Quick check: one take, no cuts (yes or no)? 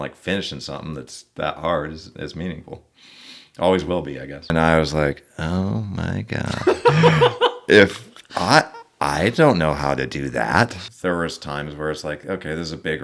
no